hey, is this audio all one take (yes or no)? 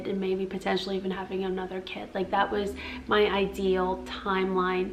yes